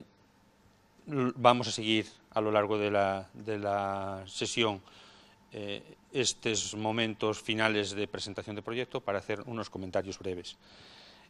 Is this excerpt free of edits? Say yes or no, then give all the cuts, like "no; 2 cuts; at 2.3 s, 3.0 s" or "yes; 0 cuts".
no; 1 cut; at 7.1 s